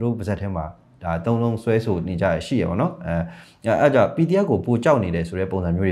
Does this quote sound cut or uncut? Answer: uncut